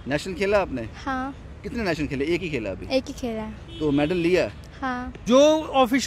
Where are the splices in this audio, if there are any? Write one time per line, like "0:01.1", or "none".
0:05.1